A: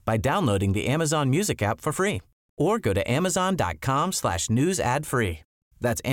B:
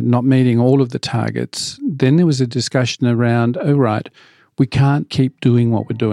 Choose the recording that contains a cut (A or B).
B